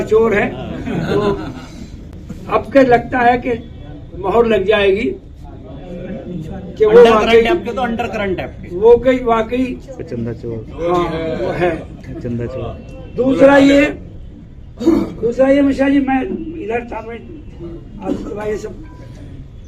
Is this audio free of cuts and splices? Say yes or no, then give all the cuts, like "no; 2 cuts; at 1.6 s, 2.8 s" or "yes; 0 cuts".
yes; 0 cuts